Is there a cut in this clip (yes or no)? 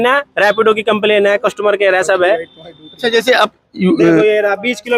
no